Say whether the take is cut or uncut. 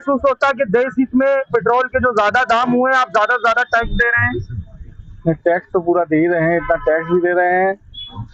uncut